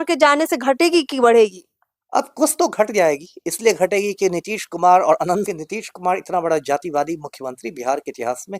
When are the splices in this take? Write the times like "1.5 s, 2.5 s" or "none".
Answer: 5.5 s